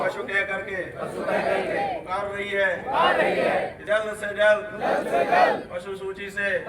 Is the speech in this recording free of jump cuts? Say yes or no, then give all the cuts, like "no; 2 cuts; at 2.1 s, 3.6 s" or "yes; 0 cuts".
no; 1 cut; at 3.8 s